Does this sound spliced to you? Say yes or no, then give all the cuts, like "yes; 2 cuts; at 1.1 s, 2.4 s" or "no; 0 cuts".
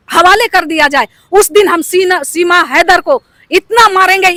no; 0 cuts